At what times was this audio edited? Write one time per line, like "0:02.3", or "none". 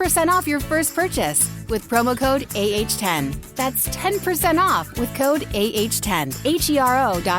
0:06.3